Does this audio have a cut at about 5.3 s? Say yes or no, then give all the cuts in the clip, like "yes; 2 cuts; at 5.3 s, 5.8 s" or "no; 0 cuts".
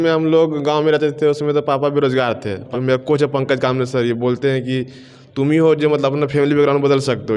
no; 1 cut; at 2.6 s